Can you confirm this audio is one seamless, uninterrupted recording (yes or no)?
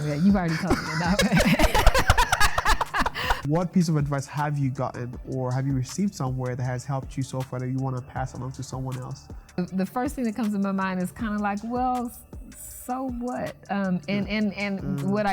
no